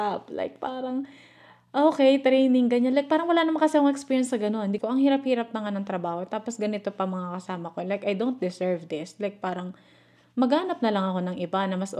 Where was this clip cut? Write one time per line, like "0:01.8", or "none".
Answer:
0:04.8